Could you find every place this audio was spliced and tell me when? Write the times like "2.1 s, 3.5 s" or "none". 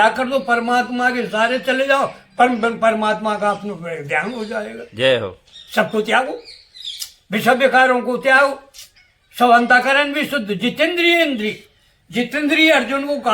none